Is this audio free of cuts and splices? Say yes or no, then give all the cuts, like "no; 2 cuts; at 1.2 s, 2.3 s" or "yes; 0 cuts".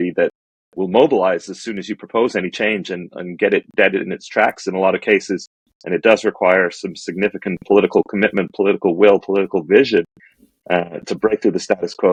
yes; 0 cuts